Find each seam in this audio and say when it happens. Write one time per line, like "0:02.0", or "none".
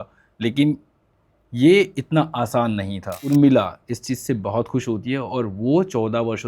0:03.3